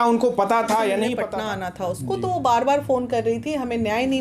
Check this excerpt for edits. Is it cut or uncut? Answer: cut